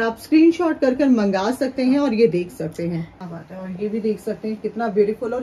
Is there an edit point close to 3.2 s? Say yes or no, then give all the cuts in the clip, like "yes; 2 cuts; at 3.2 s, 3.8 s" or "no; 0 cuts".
yes; 1 cut; at 3.2 s